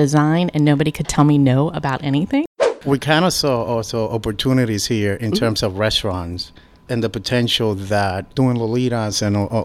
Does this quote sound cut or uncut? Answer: cut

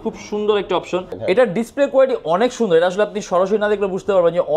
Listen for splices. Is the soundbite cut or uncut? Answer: cut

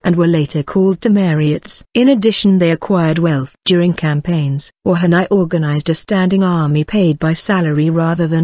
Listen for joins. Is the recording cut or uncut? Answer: cut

